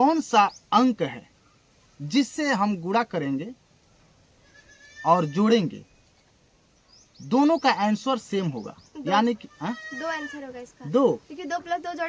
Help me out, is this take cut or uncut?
uncut